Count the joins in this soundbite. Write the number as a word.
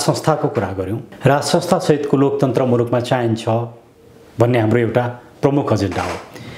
one